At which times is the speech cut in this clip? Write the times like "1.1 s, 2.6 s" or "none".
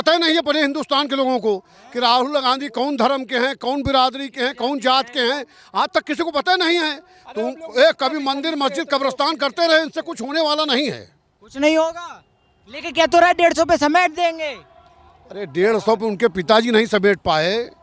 none